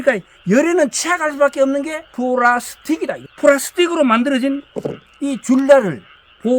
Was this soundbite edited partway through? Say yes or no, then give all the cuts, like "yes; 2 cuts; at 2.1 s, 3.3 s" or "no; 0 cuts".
yes; 2 cuts; at 2.0 s, 3.2 s